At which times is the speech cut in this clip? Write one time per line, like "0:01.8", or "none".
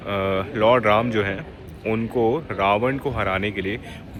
none